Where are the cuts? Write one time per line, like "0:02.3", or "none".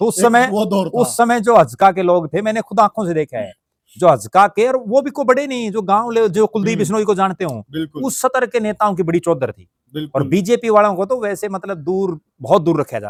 none